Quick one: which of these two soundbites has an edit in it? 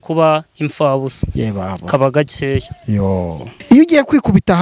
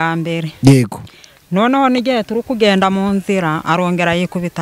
first; 1 cut; at 3.5 s

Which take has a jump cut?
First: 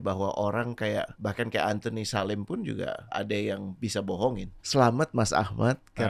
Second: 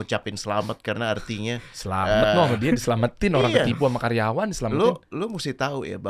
first; 3 cuts; at 1.1 s, 3.1 s, 4.5 s

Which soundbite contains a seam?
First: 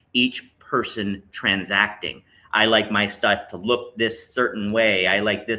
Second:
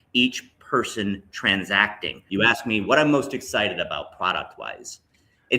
second; 1 cut; at 2.3 s

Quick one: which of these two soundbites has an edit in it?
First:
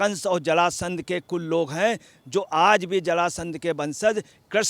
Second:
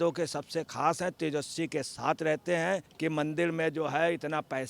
second; 1 cut; at 2.9 s

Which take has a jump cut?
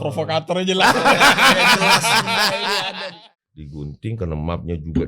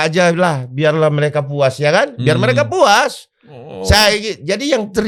first; 1 cut; at 3.1 s

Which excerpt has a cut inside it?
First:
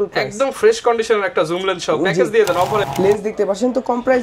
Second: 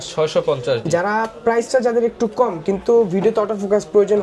first; 1 cut; at 2.9 s

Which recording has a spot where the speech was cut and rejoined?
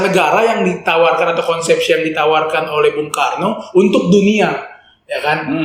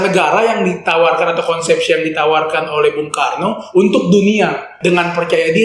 second; 1 cut; at 4.7 s

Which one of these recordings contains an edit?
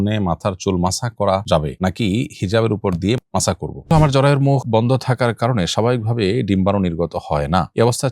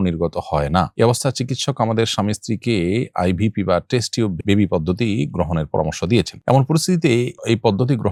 first; 1 cut; at 3.8 s

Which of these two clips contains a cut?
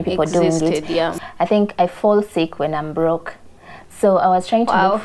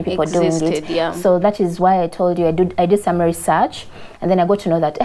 first; 1 cut; at 1.1 s

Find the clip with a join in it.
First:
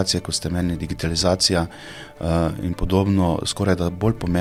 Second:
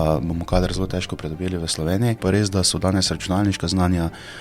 second; 1 cut; at 2.2 s

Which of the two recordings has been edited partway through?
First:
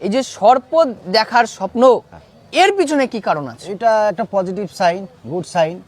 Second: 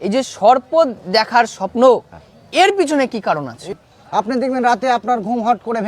second; 1 cut; at 3.7 s

